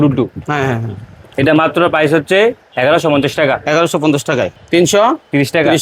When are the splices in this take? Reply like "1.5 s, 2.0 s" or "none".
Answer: 4.6 s